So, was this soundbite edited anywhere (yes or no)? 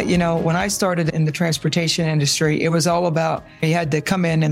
yes